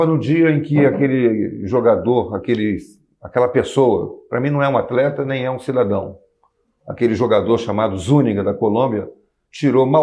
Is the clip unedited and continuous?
yes; 0 cuts

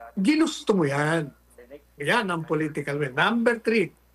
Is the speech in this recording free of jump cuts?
yes; 0 cuts

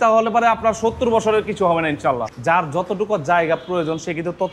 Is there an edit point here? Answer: yes; 1 cut; at 2.2 s

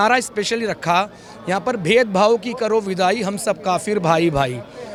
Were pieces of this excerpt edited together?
no; 0 cuts

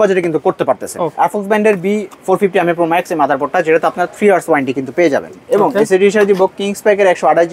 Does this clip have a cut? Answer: yes; 2 cuts; at 1.1 s, 5.3 s

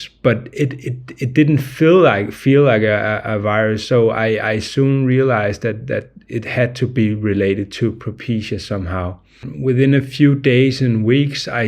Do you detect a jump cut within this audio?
yes; 1 cut; at 9.5 s

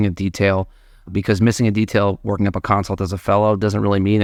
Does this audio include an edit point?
no; 0 cuts

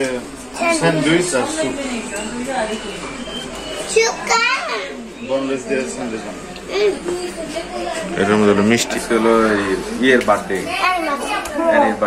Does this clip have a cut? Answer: no; 0 cuts

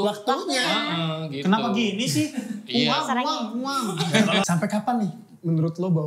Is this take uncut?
no; 1 cut; at 4.5 s

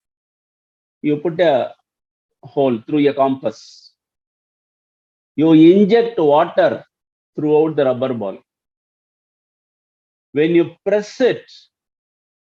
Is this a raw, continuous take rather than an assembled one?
yes; 0 cuts

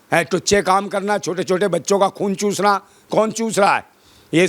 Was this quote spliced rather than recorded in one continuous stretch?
no; 0 cuts

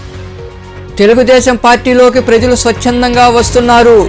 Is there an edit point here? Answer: yes; 1 cut; at 0.9 s

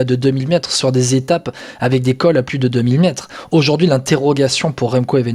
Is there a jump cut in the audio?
no; 0 cuts

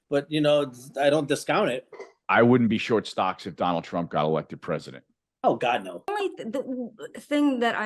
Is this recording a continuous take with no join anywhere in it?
no; 2 cuts; at 2.2 s, 6.1 s

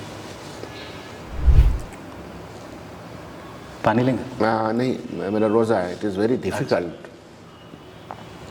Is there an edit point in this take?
no; 0 cuts

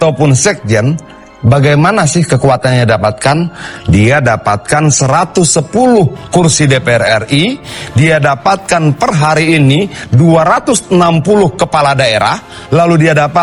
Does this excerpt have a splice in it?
no; 0 cuts

